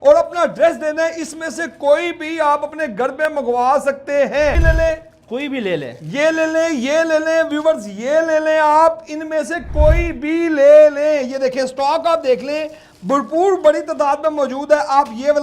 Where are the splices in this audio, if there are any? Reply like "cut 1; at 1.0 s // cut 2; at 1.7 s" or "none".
cut 1; at 4.6 s